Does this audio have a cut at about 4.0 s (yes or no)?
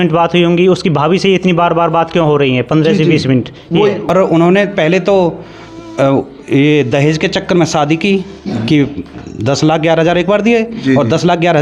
yes